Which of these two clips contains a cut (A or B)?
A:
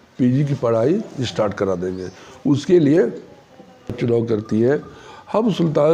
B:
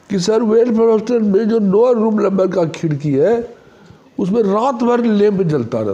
A